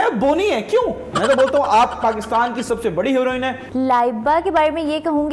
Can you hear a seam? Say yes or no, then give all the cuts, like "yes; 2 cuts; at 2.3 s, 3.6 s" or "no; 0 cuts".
yes; 2 cuts; at 1.1 s, 3.6 s